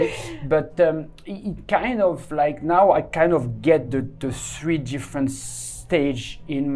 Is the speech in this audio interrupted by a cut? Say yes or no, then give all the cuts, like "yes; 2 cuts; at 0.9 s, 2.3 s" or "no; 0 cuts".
no; 0 cuts